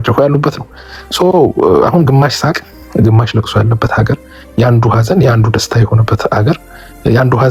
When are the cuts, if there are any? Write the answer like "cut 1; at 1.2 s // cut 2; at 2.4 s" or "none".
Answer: none